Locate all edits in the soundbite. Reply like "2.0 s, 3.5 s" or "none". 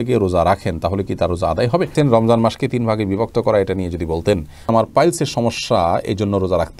1.9 s, 4.5 s